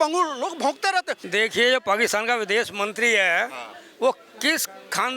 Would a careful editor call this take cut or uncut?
cut